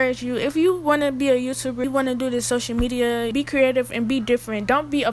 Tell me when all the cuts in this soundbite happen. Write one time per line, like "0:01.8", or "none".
0:01.8
0:03.3

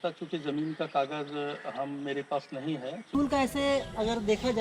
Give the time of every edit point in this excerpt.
0:03.0

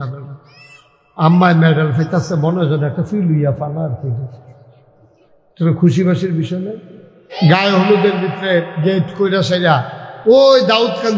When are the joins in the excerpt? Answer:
0:07.3

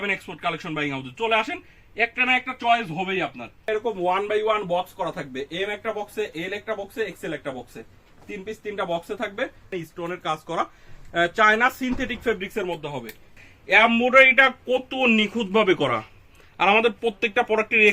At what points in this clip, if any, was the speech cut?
0:03.6
0:09.7
0:13.4

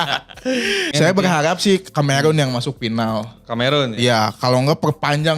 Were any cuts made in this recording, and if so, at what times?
0:00.9

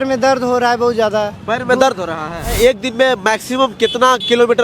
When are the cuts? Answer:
0:02.5

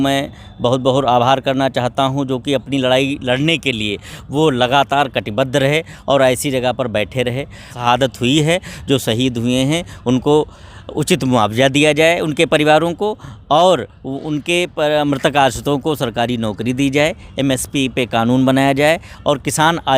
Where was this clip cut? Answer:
0:07.7

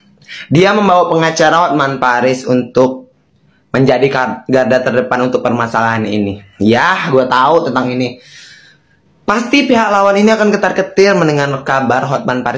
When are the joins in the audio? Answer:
none

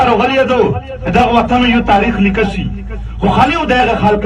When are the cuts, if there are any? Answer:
0:00.9

